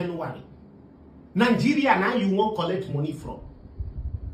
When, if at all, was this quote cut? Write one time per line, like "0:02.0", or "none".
none